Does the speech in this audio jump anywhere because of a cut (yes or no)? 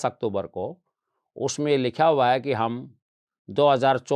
no